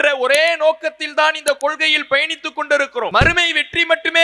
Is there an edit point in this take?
yes; 1 cut; at 3.1 s

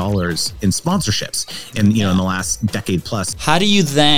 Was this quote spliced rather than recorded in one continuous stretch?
yes; 2 cuts; at 0.8 s, 3.2 s

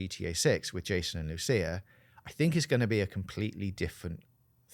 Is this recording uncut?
yes; 0 cuts

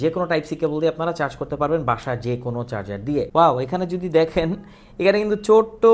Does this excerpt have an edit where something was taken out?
yes; 1 cut; at 3.3 s

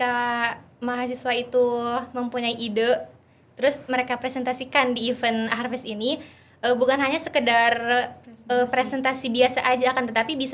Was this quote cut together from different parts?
no; 0 cuts

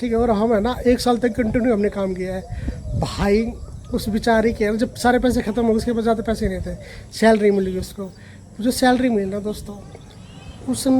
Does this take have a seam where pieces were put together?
no; 0 cuts

